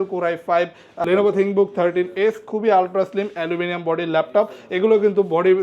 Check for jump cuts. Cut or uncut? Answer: cut